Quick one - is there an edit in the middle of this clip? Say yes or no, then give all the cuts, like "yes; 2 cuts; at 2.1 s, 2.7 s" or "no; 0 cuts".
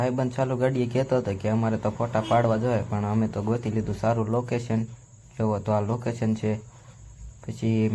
no; 0 cuts